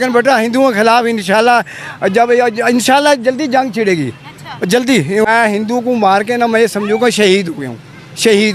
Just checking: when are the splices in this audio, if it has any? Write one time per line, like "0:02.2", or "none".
0:05.2